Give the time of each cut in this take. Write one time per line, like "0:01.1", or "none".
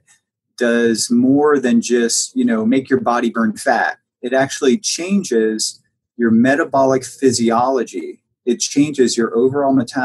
none

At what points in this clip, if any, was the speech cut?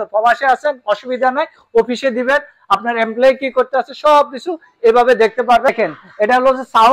0:05.7

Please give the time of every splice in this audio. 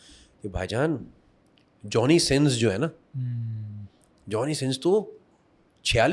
none

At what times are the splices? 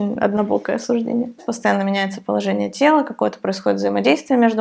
0:01.5

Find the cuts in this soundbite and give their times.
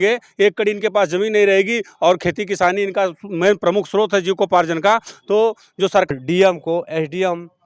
0:06.1

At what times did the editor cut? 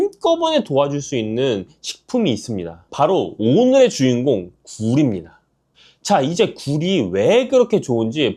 0:02.8

